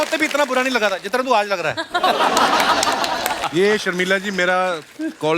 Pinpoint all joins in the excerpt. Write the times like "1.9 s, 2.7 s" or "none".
3.4 s